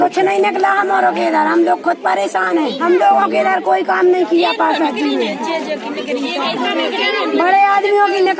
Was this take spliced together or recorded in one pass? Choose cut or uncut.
cut